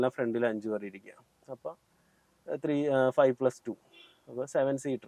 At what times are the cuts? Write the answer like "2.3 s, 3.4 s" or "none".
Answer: none